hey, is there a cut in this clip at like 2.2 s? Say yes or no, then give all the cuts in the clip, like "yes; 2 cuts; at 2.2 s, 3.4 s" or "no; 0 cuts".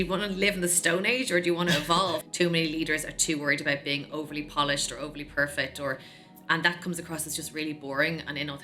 yes; 1 cut; at 2.2 s